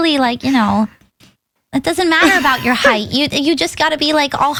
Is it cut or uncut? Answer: uncut